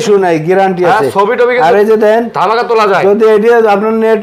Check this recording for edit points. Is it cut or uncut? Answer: uncut